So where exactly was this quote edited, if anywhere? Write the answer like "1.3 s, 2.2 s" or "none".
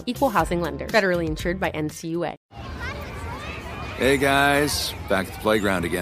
2.4 s